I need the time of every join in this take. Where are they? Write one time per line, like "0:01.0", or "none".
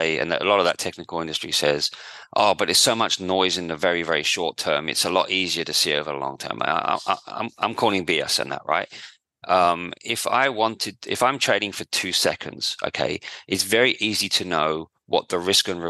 none